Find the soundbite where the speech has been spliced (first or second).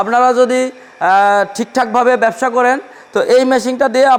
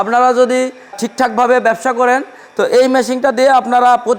second